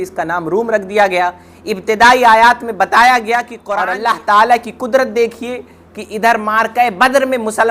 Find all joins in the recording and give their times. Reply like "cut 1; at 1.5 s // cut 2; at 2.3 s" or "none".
cut 1; at 3.6 s